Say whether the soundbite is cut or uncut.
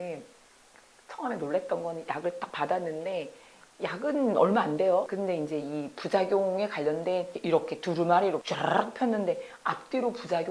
uncut